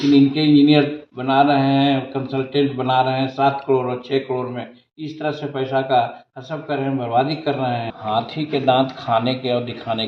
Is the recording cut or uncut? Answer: cut